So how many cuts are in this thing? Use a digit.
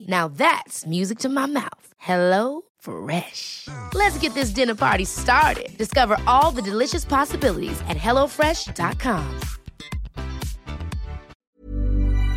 1